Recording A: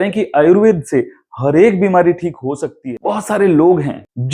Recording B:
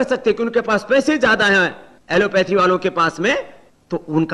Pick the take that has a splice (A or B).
A